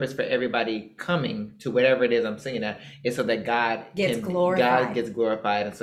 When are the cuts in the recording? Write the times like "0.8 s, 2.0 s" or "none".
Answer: none